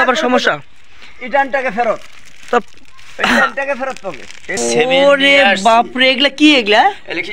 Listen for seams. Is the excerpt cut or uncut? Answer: cut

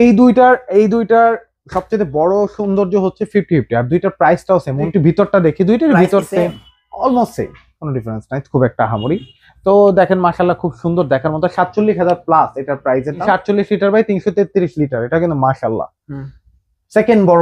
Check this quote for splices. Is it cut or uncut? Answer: cut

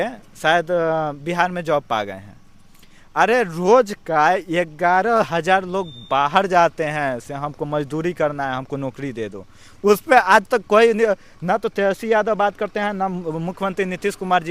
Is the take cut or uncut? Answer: uncut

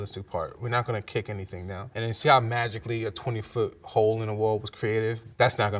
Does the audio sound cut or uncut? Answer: uncut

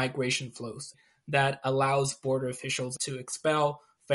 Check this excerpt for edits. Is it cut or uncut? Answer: cut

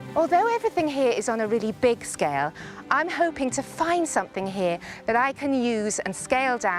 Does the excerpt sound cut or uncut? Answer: uncut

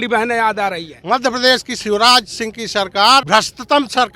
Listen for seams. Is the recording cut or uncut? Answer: cut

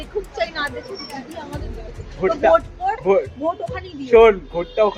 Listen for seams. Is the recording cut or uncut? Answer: uncut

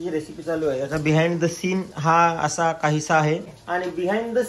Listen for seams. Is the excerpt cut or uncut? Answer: cut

